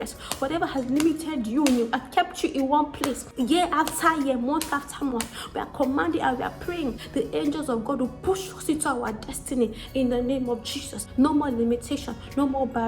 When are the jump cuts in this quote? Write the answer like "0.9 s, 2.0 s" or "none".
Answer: 3.2 s, 7.0 s, 11.0 s